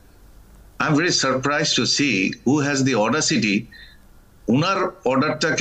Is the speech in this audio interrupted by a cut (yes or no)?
no